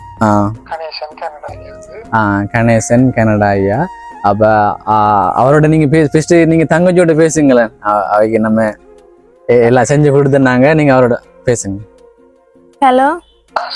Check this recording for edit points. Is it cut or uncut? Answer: uncut